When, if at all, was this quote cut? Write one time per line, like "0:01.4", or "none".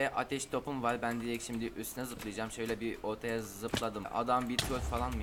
0:04.1